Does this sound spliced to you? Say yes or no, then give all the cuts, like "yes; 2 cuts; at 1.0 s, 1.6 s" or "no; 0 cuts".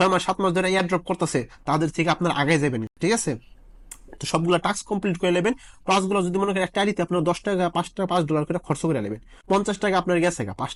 no; 0 cuts